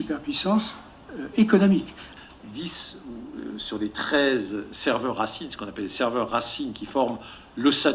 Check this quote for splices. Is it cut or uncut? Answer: cut